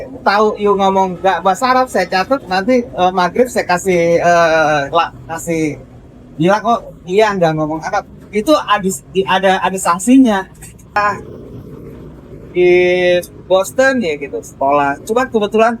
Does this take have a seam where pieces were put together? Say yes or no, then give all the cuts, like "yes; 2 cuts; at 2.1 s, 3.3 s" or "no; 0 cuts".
yes; 1 cut; at 11.0 s